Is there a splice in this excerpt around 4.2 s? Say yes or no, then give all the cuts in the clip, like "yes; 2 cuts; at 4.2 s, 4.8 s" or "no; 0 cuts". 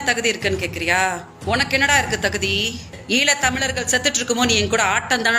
no; 2 cuts; at 1.6 s, 2.9 s